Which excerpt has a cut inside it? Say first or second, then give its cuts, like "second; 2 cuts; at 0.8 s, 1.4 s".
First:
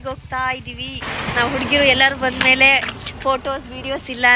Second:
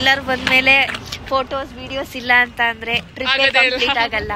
first; 1 cut; at 1.0 s